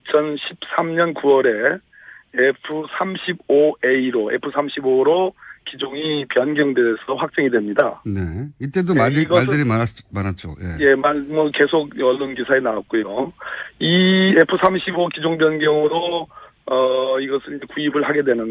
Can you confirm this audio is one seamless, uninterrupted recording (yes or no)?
yes